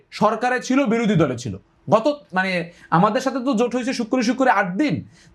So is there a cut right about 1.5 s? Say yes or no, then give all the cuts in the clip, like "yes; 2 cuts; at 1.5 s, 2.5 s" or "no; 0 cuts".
no; 0 cuts